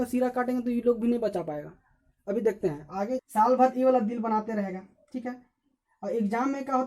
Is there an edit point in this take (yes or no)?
yes